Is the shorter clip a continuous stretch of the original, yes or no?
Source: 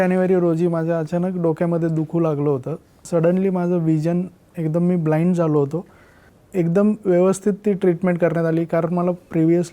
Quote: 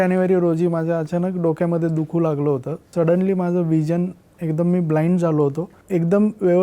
no